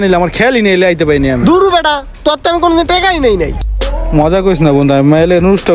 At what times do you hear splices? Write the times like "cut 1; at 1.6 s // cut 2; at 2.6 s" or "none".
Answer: cut 1; at 3.5 s

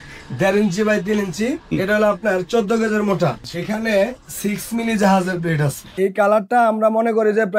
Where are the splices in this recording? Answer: cut 1; at 1.7 s // cut 2; at 3.5 s // cut 3; at 5.9 s

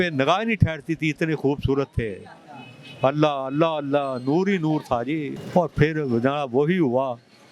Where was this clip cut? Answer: cut 1; at 5.3 s

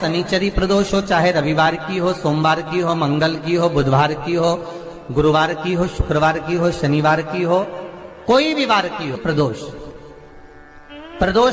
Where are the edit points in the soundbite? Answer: cut 1; at 9.2 s

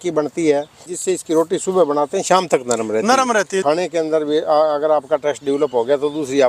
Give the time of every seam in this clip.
cut 1; at 0.9 s // cut 2; at 3.6 s

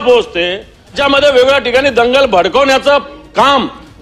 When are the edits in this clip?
cut 1; at 0.9 s

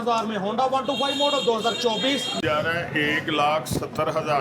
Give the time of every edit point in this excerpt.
cut 1; at 2.4 s

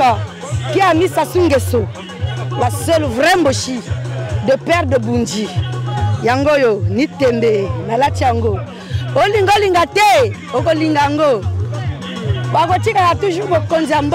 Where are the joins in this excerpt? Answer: none

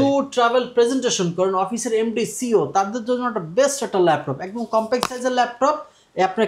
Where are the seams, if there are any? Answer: none

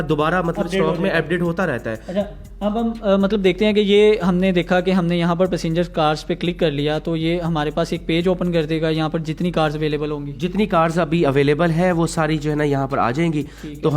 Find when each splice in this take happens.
none

